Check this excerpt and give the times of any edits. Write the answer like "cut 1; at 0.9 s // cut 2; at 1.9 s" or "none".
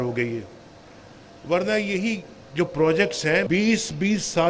cut 1; at 3.5 s